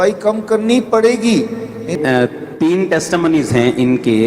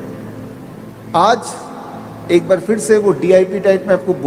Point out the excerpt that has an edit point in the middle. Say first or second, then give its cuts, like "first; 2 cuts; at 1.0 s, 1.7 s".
first; 1 cut; at 1.9 s